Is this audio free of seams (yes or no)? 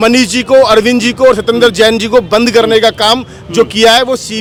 yes